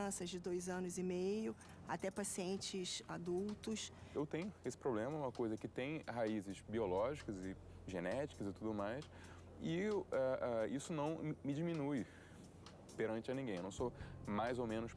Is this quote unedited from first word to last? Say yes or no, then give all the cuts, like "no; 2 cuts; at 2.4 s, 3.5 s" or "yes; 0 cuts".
no; 1 cut; at 4.1 s